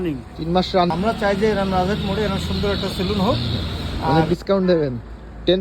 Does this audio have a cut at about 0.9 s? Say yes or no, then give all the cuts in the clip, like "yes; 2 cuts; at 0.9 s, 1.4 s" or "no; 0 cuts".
yes; 2 cuts; at 0.9 s, 4.1 s